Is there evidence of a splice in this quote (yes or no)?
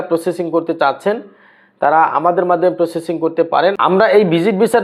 yes